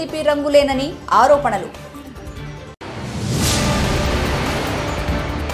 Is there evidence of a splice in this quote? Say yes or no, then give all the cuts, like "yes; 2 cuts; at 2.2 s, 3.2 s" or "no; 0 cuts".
no; 0 cuts